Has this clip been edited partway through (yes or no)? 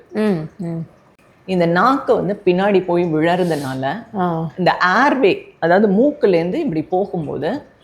yes